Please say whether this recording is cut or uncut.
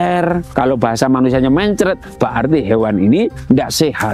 uncut